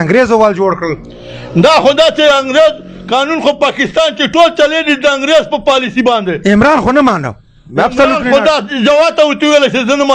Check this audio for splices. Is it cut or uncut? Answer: uncut